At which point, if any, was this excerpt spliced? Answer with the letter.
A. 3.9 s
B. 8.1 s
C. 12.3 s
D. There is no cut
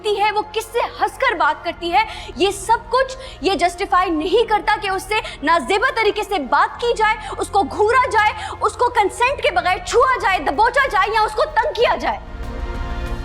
D